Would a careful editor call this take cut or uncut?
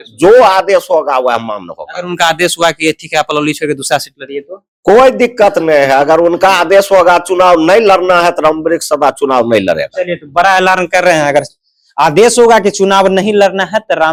uncut